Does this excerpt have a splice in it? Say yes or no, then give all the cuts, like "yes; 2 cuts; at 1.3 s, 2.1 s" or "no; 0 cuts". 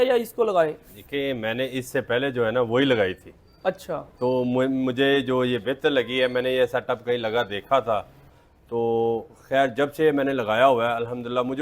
yes; 1 cut; at 8.4 s